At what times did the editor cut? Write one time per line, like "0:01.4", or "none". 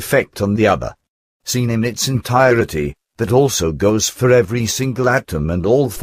0:04.6